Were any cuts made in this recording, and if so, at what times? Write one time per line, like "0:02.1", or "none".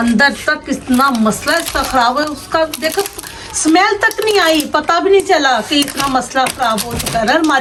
none